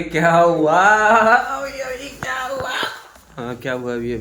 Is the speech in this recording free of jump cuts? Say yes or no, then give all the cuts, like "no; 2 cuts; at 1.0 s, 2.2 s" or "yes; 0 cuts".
yes; 0 cuts